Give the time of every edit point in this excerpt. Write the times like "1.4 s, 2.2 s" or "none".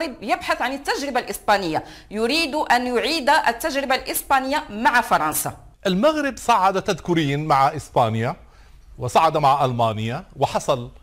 5.6 s